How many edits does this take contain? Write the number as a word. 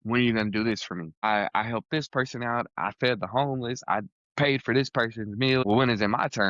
two